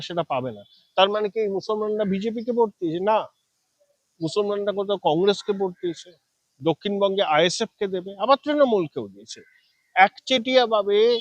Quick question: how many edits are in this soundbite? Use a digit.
0